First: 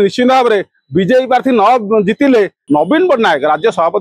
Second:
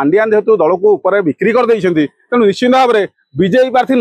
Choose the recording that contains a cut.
first; 1 cut; at 2.6 s

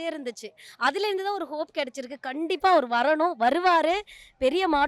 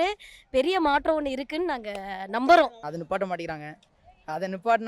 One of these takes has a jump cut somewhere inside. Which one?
second; 1 cut; at 2.8 s

